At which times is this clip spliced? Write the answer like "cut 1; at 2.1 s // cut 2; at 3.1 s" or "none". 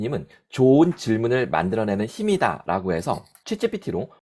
cut 1; at 3.3 s